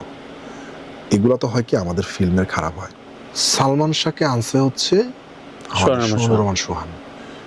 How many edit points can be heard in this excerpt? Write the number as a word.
one